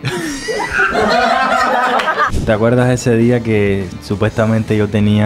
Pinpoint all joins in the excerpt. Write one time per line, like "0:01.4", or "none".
0:02.3
0:04.0